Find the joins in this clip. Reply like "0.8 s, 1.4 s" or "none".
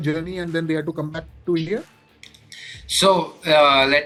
none